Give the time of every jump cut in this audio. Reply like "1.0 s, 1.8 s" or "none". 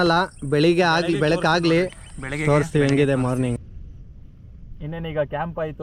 3.6 s

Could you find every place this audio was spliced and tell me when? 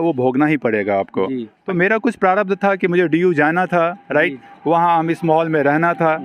1.5 s

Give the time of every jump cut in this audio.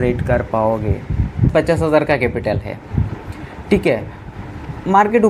1.5 s

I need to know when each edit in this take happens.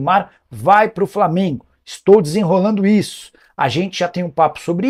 none

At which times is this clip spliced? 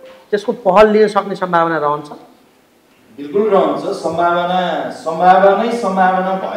none

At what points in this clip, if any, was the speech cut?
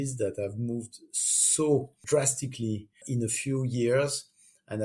2.0 s, 3.0 s

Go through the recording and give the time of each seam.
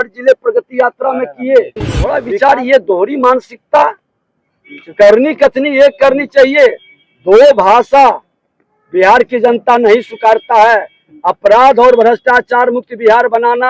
2.2 s

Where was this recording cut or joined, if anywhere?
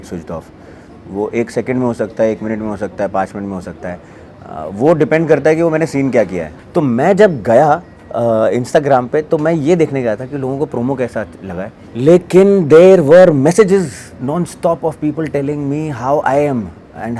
6.5 s

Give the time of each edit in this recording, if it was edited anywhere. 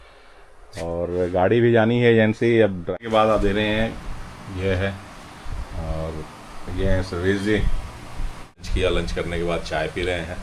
2.9 s, 8.7 s

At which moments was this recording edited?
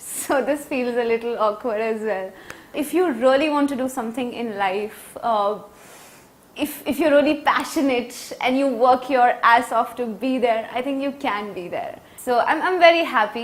2.8 s, 12.0 s

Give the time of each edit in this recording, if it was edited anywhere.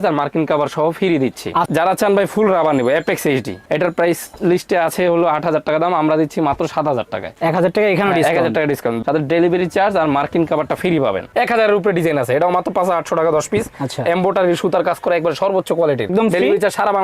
1.7 s, 9.0 s, 11.3 s, 16.1 s

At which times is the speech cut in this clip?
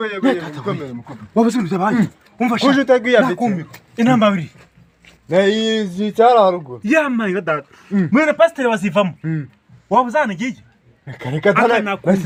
none

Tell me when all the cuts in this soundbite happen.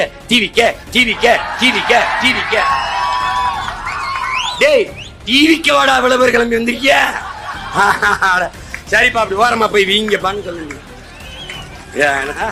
none

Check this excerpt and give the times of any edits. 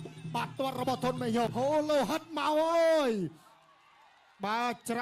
1.5 s

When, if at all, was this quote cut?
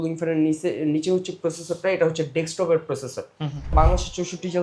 3.7 s

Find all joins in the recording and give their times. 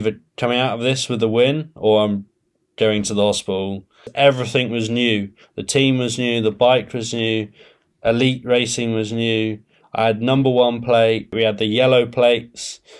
4.1 s, 11.3 s

